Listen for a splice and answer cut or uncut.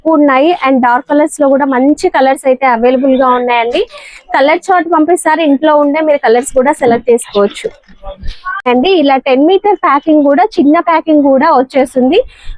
cut